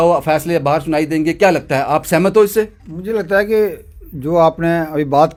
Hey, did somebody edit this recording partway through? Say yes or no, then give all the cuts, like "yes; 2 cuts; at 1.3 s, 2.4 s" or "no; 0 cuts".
no; 0 cuts